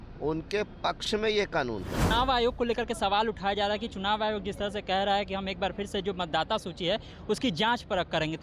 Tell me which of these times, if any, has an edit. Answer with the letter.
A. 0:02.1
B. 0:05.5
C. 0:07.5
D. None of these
A